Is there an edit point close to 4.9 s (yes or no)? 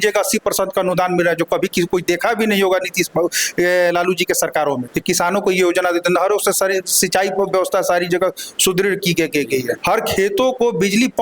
yes